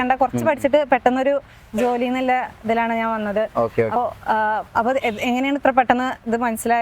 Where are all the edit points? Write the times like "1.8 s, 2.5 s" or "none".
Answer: 4.0 s